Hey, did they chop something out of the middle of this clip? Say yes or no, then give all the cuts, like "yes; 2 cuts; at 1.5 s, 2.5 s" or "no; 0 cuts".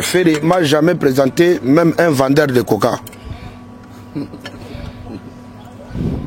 no; 0 cuts